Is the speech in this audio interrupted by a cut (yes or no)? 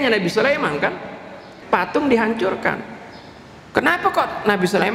yes